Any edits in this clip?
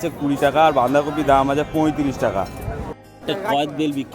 yes; 1 cut; at 2.8 s

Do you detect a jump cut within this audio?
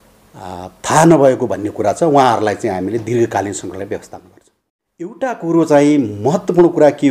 yes; 1 cut; at 5.1 s

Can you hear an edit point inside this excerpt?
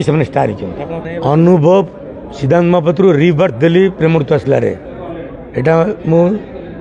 yes; 1 cut; at 1.0 s

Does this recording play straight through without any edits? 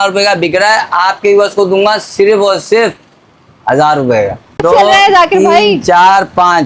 no; 1 cut; at 4.6 s

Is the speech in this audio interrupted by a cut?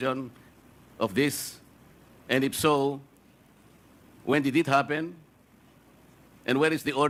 no; 0 cuts

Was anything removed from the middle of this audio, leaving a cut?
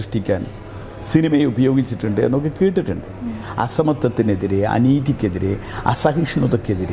yes; 1 cut; at 3.4 s

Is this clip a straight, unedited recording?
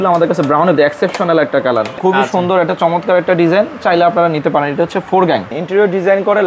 no; 2 cuts; at 2.0 s, 5.6 s

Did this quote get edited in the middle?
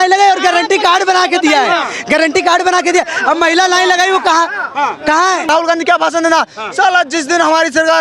yes; 1 cut; at 5.5 s

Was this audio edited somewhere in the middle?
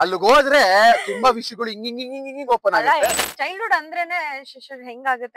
yes; 1 cut; at 3.2 s

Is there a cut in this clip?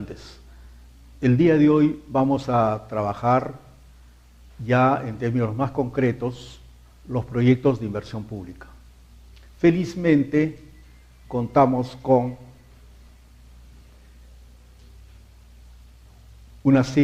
no; 0 cuts

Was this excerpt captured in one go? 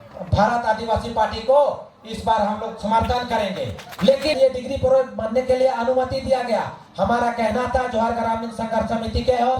no; 1 cut; at 4.3 s

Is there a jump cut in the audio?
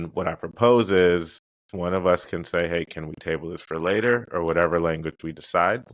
no; 0 cuts

